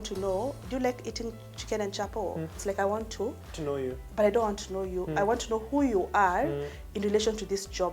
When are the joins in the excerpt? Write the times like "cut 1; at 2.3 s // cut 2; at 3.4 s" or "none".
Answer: cut 1; at 2.6 s